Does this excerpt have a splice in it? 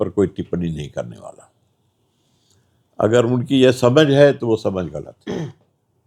no; 0 cuts

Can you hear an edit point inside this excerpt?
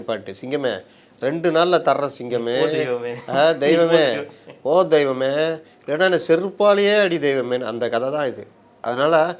no; 0 cuts

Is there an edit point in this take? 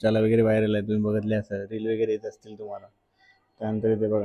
no; 0 cuts

